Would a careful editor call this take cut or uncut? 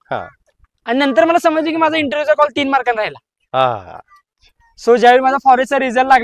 uncut